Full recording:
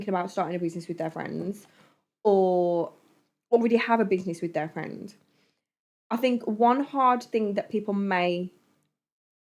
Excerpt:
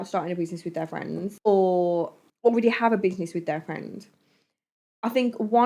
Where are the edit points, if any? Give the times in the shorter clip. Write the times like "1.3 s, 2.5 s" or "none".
1.4 s, 2.2 s